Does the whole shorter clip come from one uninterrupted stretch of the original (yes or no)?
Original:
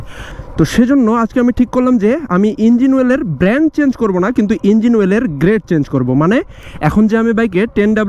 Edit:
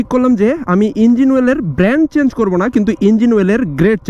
yes